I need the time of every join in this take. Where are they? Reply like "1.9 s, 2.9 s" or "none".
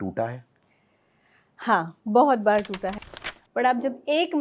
3.0 s